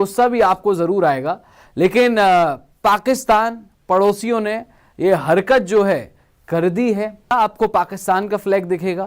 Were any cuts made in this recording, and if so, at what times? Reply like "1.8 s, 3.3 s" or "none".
7.3 s